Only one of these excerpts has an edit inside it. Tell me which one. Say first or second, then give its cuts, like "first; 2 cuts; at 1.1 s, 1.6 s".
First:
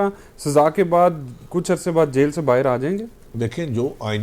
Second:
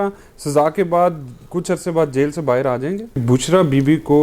second; 1 cut; at 3.2 s